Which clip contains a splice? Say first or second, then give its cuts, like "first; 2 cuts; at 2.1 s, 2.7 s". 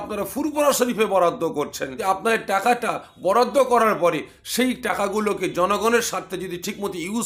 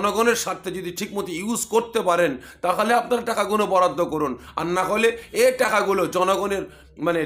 first; 1 cut; at 1.9 s